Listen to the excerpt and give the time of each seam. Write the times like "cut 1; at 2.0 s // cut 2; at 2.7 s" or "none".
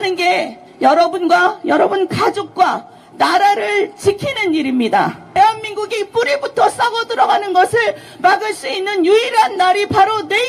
cut 1; at 5.3 s